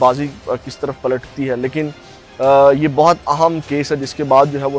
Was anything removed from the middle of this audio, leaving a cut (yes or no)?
no